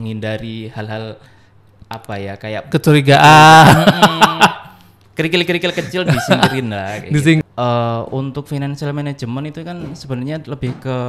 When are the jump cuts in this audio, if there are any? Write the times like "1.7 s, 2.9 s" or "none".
7.4 s

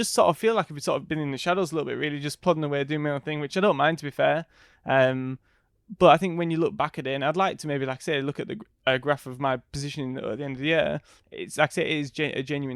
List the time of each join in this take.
none

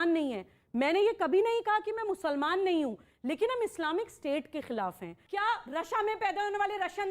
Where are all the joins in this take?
5.2 s

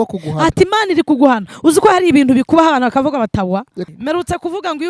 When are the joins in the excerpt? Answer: 3.8 s

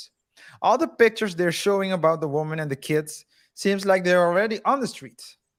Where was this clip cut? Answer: none

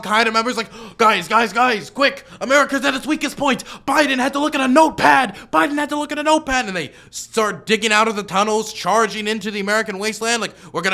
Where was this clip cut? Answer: none

